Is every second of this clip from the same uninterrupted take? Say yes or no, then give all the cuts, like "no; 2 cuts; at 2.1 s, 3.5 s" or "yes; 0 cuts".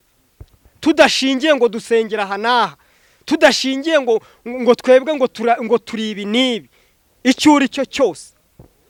yes; 0 cuts